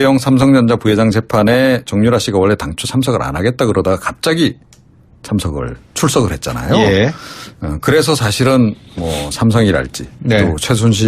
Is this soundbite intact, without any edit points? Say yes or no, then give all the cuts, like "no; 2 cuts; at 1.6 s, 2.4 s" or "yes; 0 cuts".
no; 1 cut; at 2.2 s